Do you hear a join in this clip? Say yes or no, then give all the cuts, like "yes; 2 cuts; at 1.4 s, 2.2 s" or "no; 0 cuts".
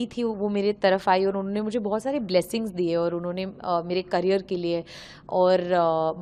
no; 0 cuts